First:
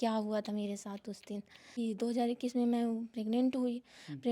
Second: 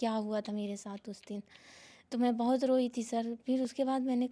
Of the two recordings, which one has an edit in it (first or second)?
first